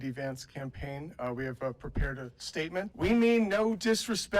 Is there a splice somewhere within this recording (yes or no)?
yes